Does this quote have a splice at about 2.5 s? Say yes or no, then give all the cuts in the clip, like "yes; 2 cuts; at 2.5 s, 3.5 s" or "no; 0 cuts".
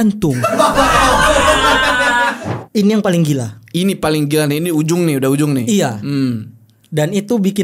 yes; 1 cut; at 2.5 s